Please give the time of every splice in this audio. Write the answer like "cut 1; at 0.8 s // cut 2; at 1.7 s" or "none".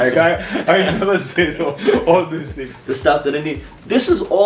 cut 1; at 2.7 s